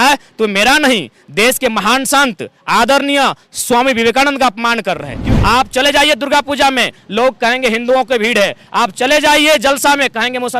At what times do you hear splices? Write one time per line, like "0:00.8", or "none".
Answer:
0:05.2